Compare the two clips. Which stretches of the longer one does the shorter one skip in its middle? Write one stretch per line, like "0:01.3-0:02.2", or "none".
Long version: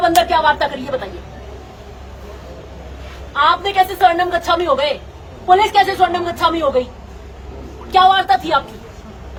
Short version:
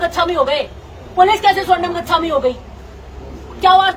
none